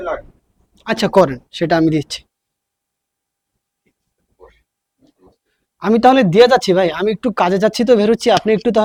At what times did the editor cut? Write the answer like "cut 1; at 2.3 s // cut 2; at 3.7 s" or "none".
none

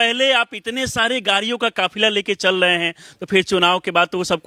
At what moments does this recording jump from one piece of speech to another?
none

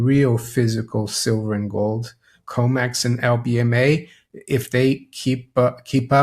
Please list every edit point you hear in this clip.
cut 1; at 2.4 s

